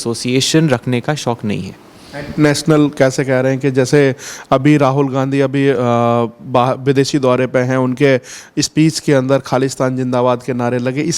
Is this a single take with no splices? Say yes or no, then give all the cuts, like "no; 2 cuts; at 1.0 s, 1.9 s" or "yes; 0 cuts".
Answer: yes; 0 cuts